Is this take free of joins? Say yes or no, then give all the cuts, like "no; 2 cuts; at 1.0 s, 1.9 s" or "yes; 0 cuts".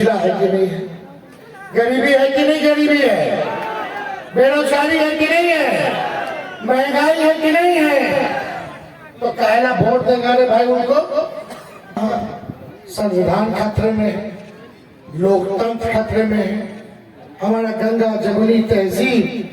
no; 1 cut; at 12.0 s